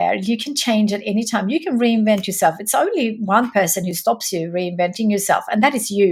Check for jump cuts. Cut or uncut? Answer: uncut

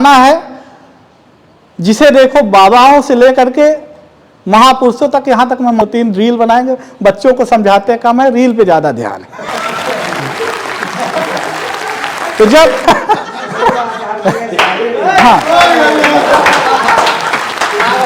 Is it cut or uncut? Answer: cut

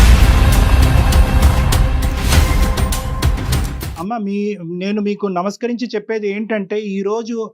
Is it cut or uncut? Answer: uncut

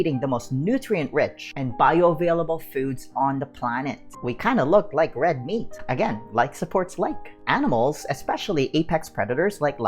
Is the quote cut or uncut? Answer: cut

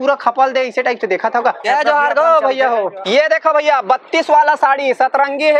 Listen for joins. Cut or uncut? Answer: cut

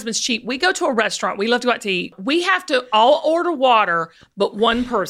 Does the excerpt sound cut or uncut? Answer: cut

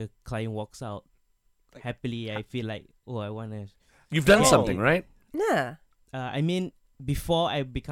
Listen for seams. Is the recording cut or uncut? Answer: uncut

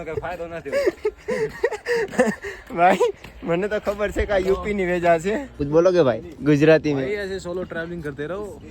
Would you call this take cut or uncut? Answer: cut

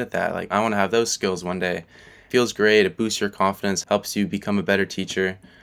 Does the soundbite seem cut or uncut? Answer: uncut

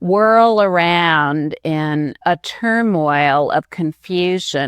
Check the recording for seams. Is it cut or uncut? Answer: cut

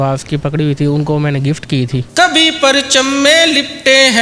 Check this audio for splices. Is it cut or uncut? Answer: cut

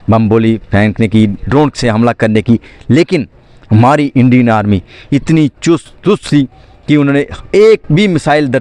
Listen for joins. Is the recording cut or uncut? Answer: uncut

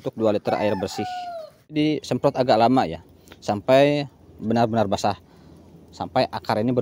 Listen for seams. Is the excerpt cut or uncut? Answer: cut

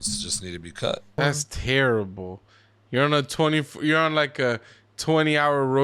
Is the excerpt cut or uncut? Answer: cut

